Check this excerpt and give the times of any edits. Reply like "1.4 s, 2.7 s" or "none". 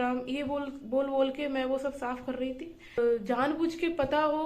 3.0 s